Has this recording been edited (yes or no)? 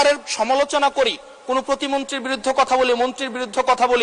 no